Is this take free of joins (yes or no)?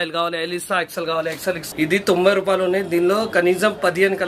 no